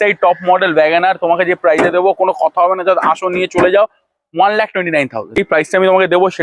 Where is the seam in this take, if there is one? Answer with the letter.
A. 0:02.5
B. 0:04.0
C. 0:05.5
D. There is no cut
C